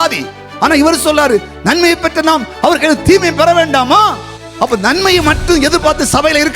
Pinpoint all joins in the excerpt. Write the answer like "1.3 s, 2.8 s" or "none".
4.3 s